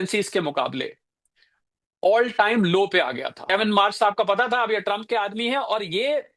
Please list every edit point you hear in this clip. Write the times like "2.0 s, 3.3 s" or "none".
3.5 s